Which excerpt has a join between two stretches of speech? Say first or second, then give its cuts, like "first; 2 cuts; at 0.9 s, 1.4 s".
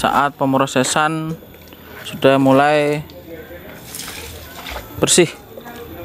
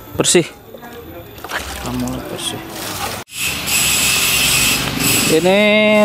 second; 1 cut; at 3.3 s